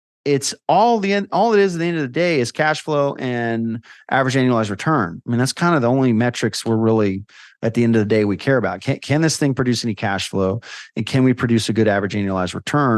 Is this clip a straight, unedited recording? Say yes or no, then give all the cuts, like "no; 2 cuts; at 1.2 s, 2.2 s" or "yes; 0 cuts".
yes; 0 cuts